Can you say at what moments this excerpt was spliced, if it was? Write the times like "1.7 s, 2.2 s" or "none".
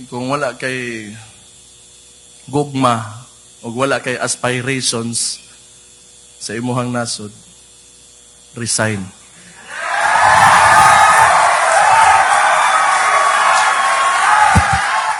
none